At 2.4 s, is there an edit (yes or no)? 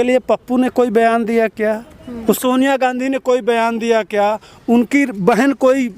yes